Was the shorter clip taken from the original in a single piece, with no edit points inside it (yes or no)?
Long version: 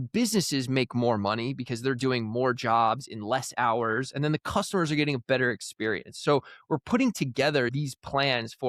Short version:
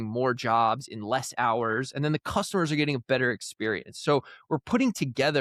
yes